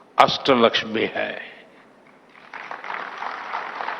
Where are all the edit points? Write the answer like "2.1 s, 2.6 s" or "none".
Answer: 1.1 s